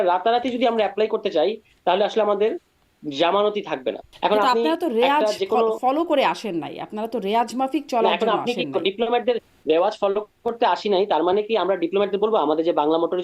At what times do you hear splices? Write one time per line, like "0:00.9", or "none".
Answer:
0:04.0